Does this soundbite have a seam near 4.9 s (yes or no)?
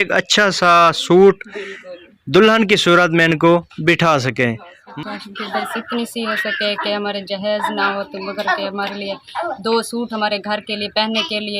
yes